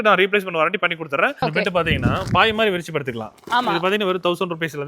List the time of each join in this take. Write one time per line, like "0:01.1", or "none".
0:01.4